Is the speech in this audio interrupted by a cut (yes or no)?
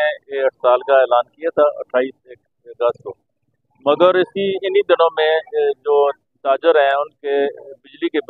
no